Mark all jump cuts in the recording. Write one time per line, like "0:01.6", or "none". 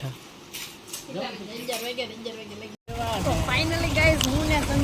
0:02.8